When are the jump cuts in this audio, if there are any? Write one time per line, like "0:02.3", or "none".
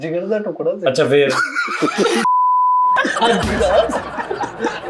none